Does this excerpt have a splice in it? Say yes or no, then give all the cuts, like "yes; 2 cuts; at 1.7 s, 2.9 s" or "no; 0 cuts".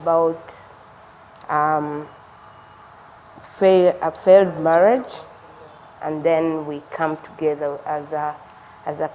no; 0 cuts